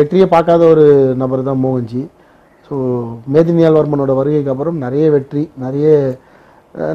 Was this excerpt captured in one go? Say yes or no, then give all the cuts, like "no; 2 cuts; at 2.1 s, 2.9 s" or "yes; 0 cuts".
yes; 0 cuts